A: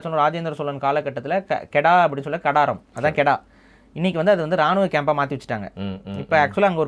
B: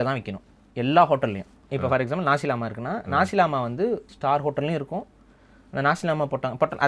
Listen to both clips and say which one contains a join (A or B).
B